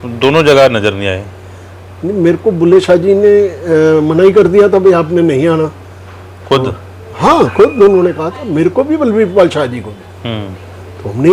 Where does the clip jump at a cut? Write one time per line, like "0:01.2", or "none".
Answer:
none